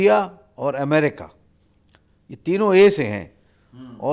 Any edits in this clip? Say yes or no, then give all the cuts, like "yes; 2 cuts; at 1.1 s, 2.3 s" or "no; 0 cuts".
no; 0 cuts